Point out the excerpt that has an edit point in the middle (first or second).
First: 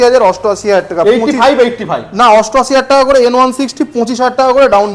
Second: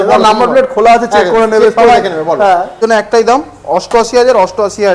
second